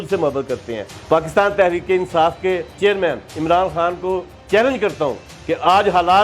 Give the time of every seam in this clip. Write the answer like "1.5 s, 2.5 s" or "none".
0.9 s, 3.3 s, 4.3 s, 5.3 s